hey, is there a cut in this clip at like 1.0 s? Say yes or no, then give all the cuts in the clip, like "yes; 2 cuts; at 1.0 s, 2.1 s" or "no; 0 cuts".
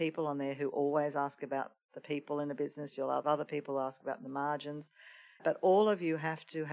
no; 2 cuts; at 3.2 s, 5.4 s